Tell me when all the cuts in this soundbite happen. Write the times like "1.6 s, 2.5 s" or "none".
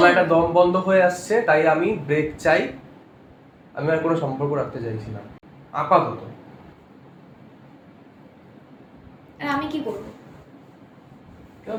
none